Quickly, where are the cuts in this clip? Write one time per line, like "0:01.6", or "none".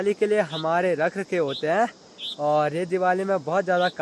none